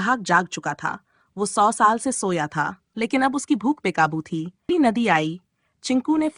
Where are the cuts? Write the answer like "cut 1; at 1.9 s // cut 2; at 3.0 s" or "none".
cut 1; at 4.7 s